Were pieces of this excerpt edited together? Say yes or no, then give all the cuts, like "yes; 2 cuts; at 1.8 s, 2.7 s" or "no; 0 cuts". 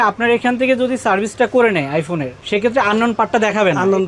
no; 0 cuts